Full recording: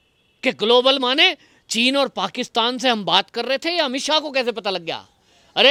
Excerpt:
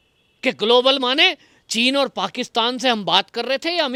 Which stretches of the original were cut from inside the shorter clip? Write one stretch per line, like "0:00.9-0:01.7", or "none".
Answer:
none